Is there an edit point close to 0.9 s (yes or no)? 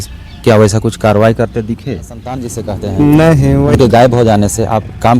no